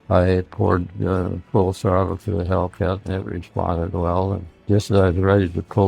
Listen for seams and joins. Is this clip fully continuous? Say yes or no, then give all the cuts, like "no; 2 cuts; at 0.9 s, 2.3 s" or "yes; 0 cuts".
no; 1 cut; at 4.5 s